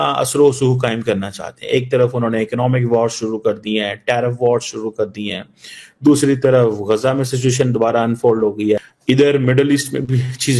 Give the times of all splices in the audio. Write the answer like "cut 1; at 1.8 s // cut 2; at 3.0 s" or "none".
none